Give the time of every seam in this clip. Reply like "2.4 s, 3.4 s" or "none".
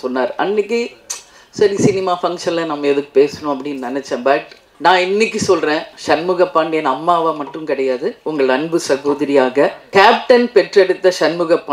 4.6 s, 9.8 s